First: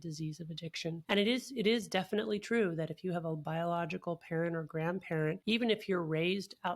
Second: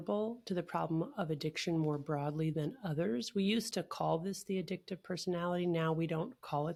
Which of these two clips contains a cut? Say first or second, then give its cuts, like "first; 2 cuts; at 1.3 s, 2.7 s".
first; 2 cuts; at 1.0 s, 5.4 s